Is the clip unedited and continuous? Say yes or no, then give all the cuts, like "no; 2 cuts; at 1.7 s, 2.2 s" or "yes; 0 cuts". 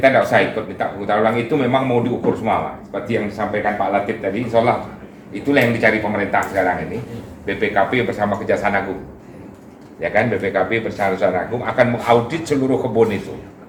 yes; 0 cuts